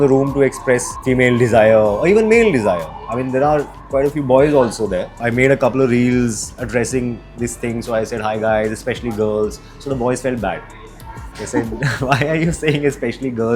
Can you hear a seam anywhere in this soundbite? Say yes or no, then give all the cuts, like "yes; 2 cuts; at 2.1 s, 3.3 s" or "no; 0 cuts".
yes; 2 cuts; at 0.9 s, 5.2 s